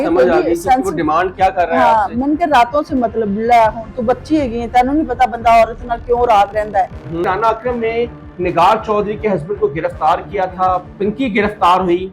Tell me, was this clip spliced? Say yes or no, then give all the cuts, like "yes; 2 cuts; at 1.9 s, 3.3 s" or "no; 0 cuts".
yes; 2 cuts; at 7.2 s, 10.9 s